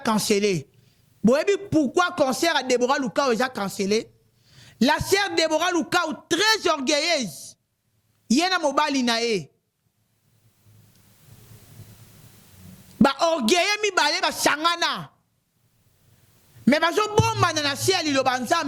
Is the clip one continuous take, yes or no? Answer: yes